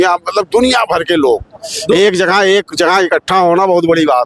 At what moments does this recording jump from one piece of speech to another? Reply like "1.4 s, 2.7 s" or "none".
none